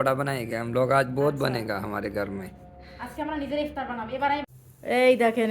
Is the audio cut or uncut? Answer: cut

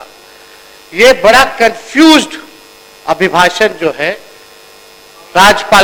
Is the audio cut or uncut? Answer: uncut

